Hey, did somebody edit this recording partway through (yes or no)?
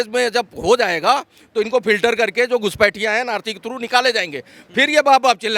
no